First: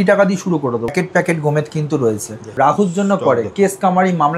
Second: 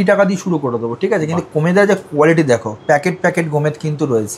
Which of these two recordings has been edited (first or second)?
first